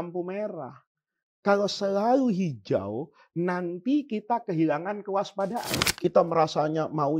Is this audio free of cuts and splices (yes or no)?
no